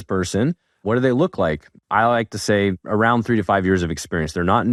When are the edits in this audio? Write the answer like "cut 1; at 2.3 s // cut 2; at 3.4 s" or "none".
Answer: none